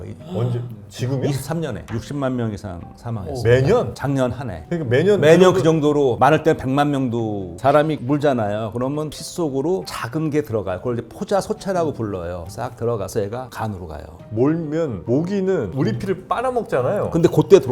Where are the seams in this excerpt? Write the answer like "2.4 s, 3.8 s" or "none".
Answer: 1.8 s, 7.6 s, 14.2 s